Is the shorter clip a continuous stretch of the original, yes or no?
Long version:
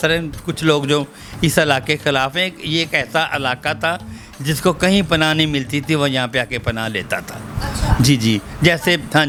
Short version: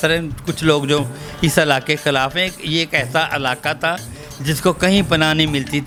yes